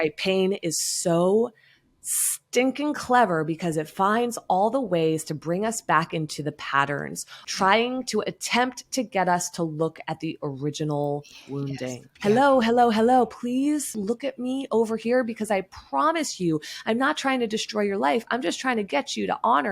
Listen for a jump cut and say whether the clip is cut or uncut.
cut